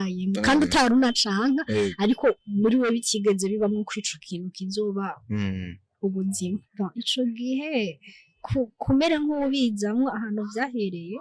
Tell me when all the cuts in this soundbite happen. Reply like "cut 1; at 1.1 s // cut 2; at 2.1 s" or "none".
cut 1; at 6.6 s